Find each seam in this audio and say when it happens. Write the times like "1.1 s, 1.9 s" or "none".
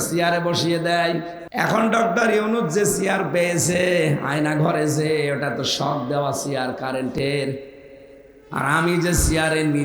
1.4 s